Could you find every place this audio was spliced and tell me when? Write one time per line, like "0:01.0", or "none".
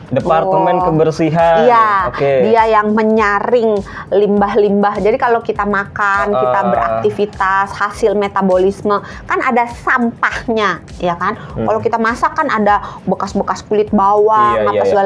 none